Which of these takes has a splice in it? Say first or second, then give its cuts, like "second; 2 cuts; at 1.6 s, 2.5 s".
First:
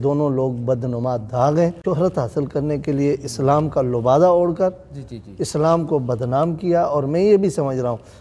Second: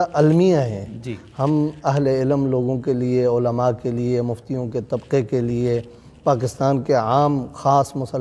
first; 1 cut; at 1.8 s